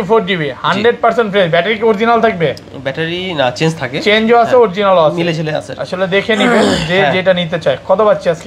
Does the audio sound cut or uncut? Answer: uncut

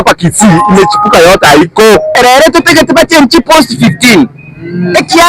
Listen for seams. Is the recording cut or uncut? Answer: cut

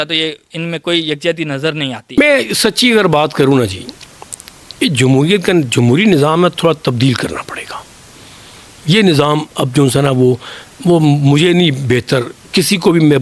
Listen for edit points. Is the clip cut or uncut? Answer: uncut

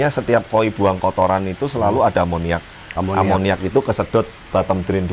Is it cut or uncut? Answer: uncut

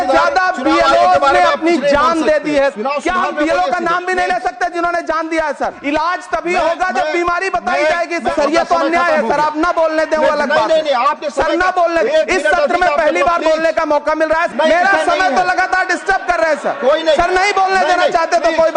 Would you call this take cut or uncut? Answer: cut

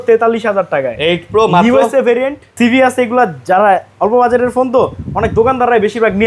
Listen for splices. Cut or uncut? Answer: cut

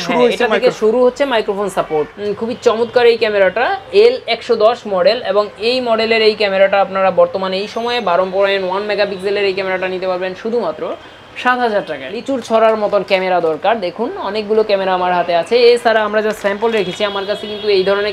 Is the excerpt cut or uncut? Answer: cut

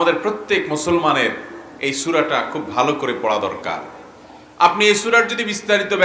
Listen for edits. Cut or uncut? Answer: uncut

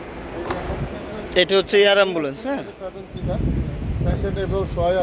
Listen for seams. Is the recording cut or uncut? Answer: uncut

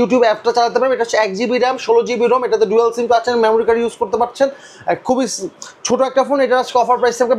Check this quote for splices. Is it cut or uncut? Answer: uncut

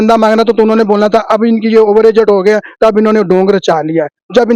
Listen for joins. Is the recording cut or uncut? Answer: uncut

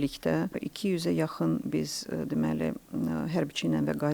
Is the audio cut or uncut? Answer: uncut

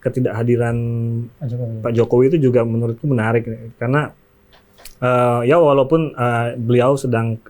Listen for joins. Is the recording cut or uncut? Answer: uncut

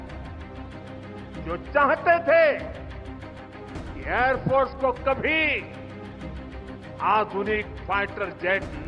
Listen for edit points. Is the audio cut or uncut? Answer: uncut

